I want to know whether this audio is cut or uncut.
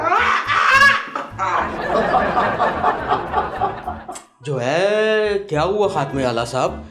uncut